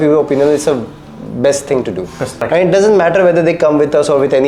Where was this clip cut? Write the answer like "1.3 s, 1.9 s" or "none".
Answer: 2.3 s